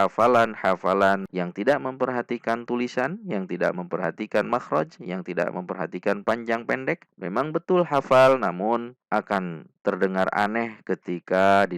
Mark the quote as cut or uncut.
cut